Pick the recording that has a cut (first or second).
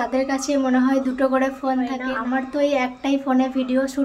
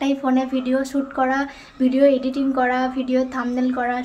first